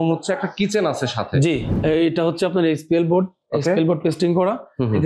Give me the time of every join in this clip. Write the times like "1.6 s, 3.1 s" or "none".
1.7 s